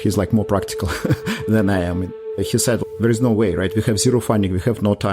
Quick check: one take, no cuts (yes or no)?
no